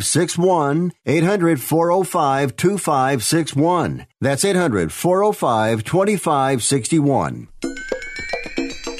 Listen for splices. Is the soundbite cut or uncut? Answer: cut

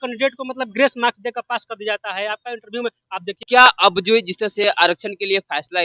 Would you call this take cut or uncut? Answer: cut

